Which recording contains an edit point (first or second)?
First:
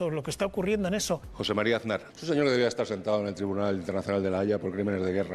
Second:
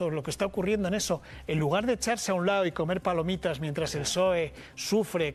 first